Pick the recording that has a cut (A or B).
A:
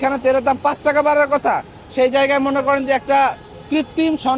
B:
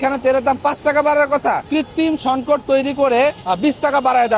B